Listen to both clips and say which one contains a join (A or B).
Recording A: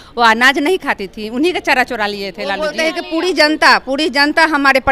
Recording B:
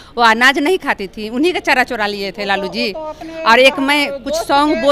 A